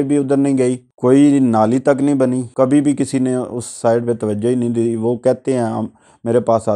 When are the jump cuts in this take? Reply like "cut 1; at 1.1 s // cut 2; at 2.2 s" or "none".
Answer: cut 1; at 0.9 s // cut 2; at 2.5 s